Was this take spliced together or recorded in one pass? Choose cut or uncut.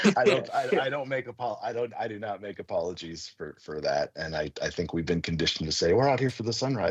uncut